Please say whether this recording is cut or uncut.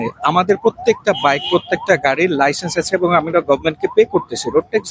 uncut